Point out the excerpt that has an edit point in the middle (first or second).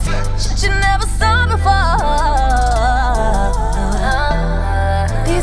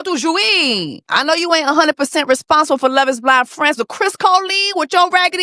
second